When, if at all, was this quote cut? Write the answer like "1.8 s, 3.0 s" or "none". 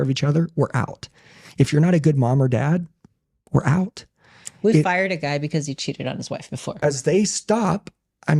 6.8 s

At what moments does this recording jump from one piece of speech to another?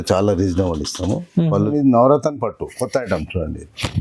1.3 s

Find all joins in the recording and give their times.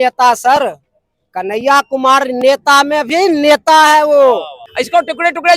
4.6 s

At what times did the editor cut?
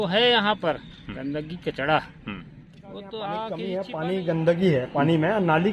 3.7 s

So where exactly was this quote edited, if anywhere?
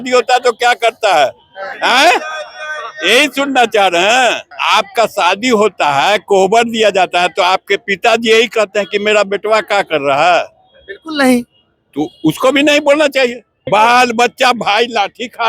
4.5 s, 13.6 s

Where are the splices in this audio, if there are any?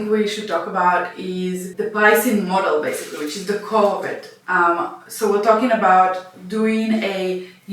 1.7 s

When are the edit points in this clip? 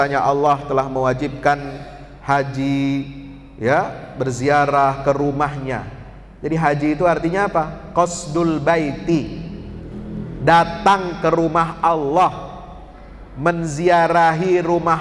none

